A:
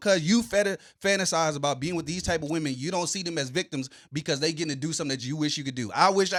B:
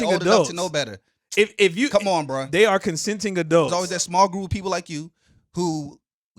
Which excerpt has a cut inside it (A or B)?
B